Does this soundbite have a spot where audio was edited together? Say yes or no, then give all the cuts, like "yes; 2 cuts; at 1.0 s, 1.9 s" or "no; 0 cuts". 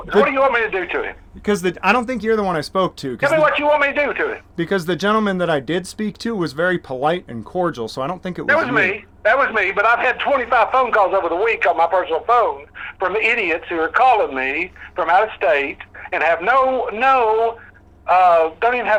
no; 0 cuts